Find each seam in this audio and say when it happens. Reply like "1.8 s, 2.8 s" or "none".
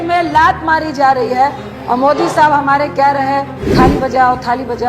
1.7 s, 3.6 s